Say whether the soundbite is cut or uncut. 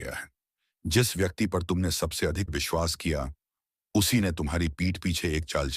cut